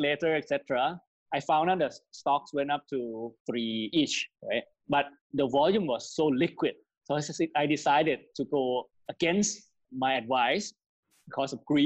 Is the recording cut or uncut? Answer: cut